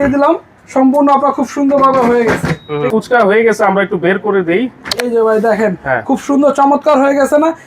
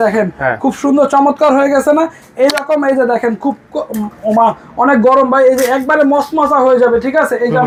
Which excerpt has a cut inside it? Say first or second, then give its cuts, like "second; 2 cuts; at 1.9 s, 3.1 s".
first; 1 cut; at 2.9 s